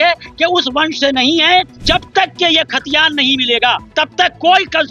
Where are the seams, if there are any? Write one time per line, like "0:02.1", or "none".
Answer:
0:01.7
0:03.8